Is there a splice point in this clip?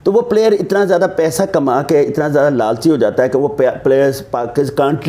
no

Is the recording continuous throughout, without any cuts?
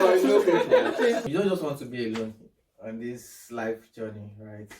no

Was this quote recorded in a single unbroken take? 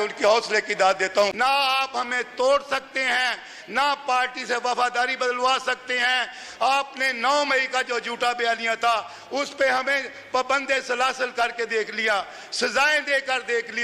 no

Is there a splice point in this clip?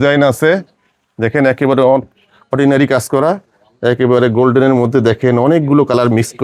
no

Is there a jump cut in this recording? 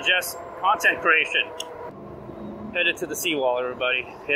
yes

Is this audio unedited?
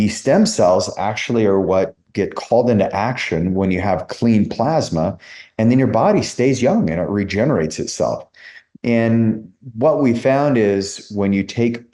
yes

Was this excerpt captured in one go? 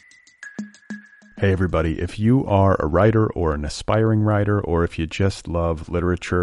no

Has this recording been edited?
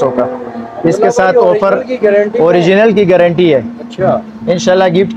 no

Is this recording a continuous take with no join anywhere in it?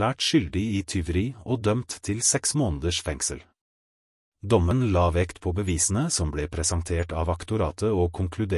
no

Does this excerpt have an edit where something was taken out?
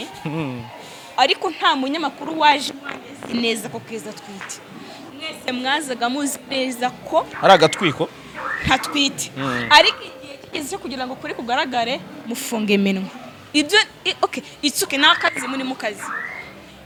no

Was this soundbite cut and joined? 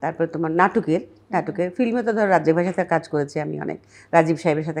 no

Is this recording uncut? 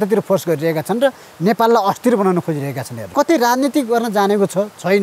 no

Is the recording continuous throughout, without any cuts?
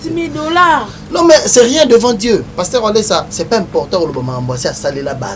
no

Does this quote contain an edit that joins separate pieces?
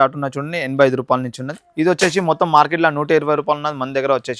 no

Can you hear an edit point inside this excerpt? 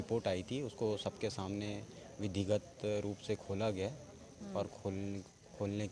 no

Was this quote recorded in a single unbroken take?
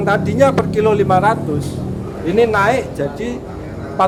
yes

